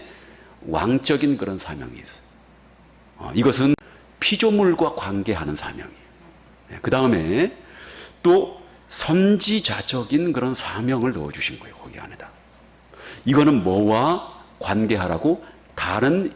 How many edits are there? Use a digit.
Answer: 1